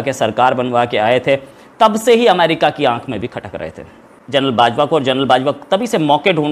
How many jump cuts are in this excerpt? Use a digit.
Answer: 1